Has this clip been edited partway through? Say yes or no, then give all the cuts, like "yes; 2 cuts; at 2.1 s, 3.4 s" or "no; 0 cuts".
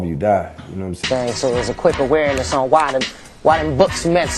yes; 1 cut; at 1.0 s